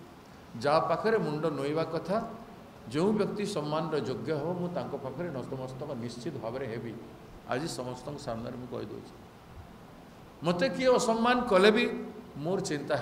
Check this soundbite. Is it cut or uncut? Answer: uncut